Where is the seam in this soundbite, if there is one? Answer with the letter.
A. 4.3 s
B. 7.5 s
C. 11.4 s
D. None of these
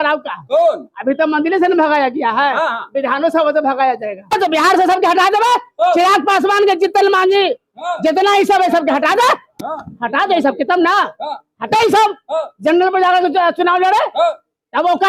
A